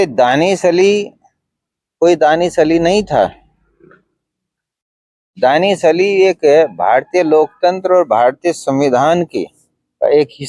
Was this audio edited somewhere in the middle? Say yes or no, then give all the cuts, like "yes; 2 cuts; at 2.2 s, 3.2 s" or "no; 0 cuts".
no; 0 cuts